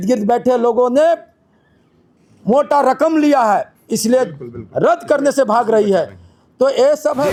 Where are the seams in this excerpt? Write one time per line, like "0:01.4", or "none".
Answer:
none